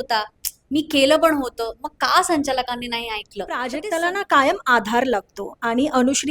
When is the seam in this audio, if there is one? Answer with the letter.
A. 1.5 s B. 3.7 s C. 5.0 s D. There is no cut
B